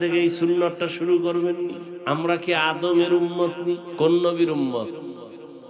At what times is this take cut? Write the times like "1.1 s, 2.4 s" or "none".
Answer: 1.9 s, 3.9 s